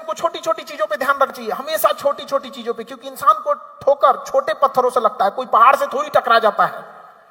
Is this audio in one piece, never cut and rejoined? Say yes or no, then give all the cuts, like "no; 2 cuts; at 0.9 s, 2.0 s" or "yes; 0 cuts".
no; 1 cut; at 1.4 s